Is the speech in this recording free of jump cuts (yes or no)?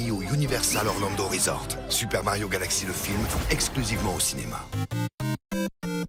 yes